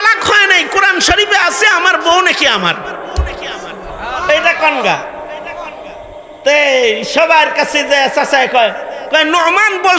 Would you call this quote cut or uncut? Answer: uncut